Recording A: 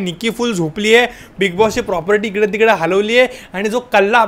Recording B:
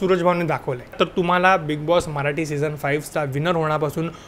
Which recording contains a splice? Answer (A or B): B